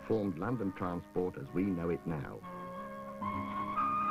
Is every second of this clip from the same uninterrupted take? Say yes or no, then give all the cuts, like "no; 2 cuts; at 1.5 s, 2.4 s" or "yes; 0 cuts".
yes; 0 cuts